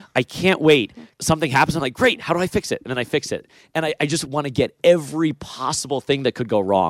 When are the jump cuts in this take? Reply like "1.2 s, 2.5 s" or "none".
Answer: 1.1 s, 4.2 s

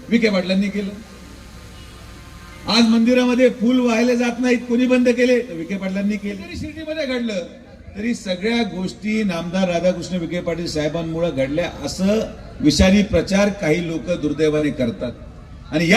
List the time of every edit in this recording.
6.7 s

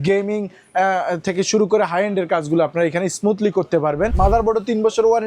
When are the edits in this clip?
4.1 s

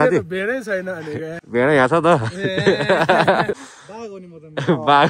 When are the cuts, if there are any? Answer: 1.4 s, 3.7 s

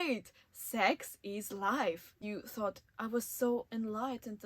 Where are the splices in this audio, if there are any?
2.2 s

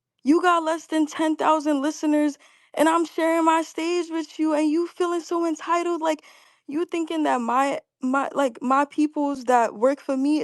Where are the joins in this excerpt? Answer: 6.6 s

